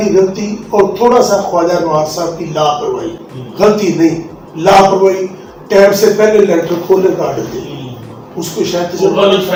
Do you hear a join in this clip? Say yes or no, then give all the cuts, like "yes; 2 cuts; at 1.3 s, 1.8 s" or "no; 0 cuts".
no; 0 cuts